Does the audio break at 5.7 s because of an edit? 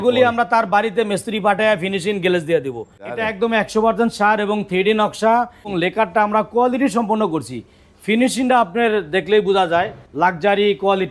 yes; 3 cuts; at 3.2 s, 5.7 s, 10.0 s

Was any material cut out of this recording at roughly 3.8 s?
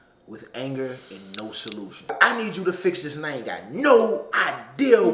no; 1 cut; at 2.1 s

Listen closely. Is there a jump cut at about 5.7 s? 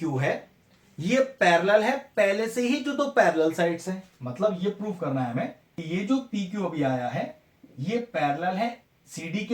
yes; 1 cut; at 5.7 s

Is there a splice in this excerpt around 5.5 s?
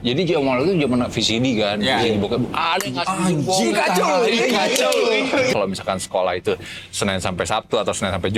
yes; 1 cut; at 5.5 s

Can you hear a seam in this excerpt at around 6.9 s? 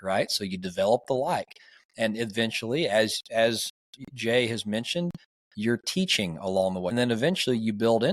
yes; 1 cut; at 6.9 s

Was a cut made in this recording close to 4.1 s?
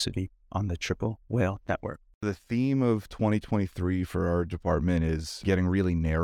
no; 2 cuts; at 2.2 s, 5.3 s

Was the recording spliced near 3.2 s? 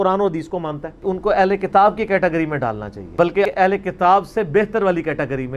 yes; 1 cut; at 3.2 s

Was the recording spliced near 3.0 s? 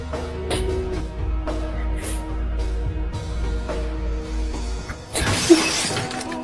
no; 1 cut; at 1.0 s

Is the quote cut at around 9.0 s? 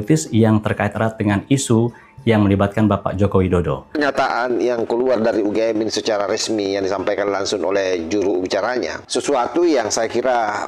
yes; 2 cuts; at 4.0 s, 9.0 s

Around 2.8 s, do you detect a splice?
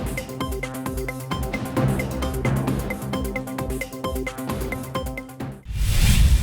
no; 1 cut; at 5.5 s

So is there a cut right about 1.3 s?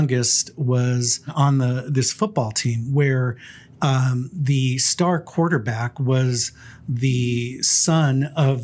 yes; 1 cut; at 1.3 s

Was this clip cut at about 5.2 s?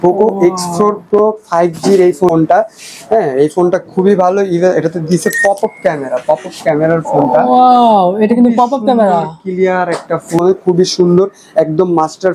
no; 2 cuts; at 2.3 s, 10.4 s

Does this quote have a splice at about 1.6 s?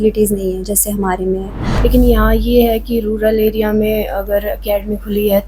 yes; 1 cut; at 1.6 s

